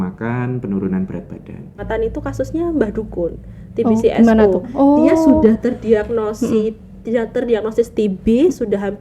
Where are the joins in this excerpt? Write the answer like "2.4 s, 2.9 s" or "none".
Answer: 1.8 s